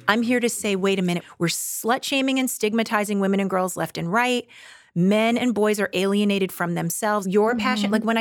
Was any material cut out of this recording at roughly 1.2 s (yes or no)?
yes